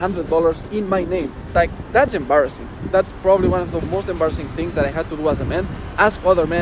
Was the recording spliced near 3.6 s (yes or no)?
no